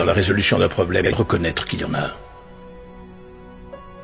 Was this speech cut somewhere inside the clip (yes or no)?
yes